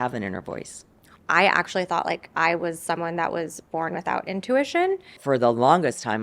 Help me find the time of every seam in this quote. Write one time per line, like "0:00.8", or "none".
0:01.1
0:05.2